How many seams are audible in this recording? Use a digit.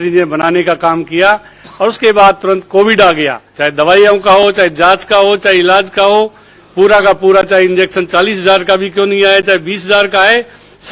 1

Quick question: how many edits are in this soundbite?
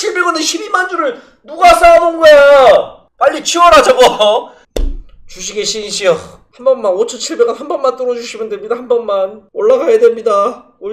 3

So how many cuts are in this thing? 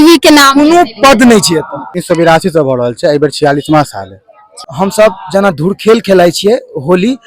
2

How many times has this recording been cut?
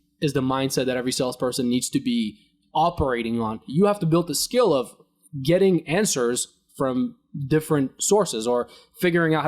1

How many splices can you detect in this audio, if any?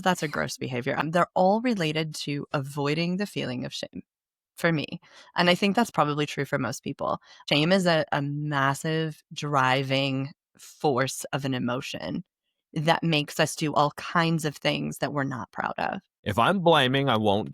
3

